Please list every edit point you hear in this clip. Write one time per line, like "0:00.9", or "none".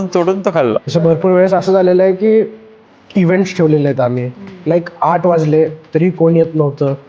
0:00.8
0:04.6